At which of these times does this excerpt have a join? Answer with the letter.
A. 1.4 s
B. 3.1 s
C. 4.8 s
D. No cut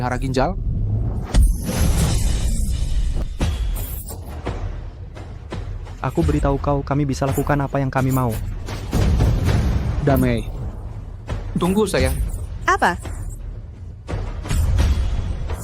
B